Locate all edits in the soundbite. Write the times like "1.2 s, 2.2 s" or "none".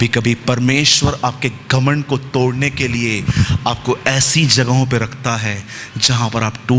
none